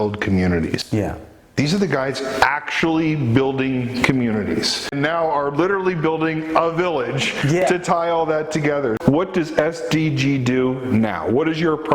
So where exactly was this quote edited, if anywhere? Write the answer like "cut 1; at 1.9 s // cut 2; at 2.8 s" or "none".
cut 1; at 4.9 s // cut 2; at 9.0 s